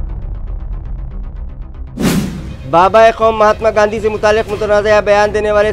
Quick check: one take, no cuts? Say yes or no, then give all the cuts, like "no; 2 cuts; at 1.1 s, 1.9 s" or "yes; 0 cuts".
no; 1 cut; at 2.2 s